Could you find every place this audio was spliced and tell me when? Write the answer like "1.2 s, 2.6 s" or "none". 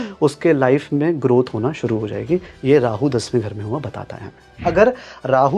4.6 s